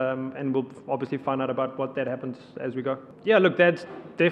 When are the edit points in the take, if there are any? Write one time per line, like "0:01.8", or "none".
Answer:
0:03.1